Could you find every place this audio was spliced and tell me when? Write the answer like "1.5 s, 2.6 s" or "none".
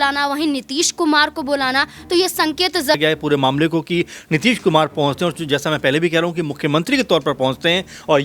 2.9 s